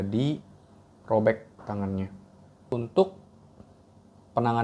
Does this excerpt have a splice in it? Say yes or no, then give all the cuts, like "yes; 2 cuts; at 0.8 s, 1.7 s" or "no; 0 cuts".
yes; 1 cut; at 2.7 s